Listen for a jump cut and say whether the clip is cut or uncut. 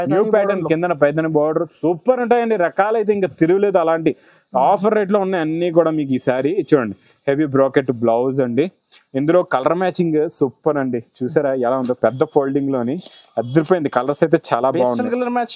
uncut